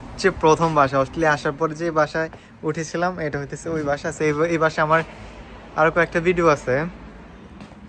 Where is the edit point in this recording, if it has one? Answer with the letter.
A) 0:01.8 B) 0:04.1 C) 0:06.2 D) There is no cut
D